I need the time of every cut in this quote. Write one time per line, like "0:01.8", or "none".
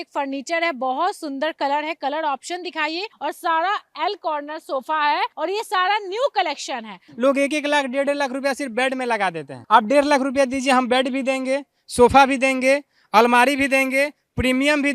0:03.1
0:05.3
0:07.0